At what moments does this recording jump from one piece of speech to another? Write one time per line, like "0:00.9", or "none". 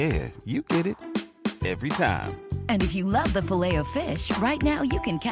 none